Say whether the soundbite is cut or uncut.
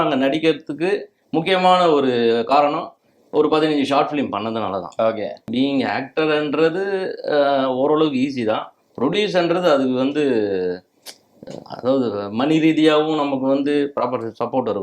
cut